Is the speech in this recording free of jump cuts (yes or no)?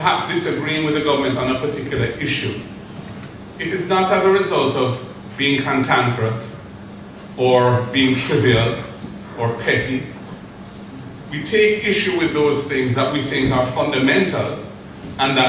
yes